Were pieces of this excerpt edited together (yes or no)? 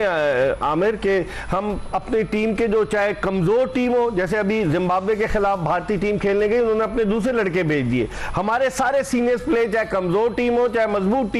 no